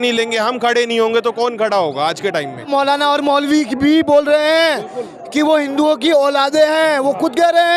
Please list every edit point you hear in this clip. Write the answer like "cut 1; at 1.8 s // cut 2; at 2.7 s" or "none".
cut 1; at 2.6 s